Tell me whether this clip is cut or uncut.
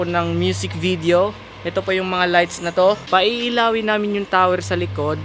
cut